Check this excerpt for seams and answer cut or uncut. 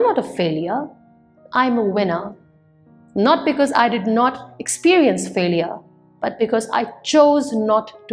uncut